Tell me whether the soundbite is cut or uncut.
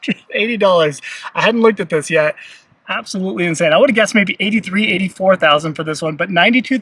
uncut